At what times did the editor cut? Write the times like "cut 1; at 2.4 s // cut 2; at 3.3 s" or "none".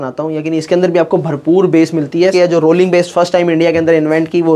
cut 1; at 2.3 s